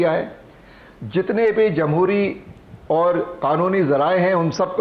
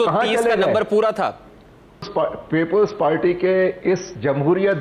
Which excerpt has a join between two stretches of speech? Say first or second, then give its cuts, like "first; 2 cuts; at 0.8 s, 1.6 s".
second; 1 cut; at 2.1 s